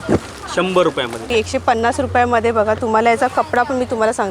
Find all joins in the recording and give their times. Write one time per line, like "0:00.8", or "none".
0:01.3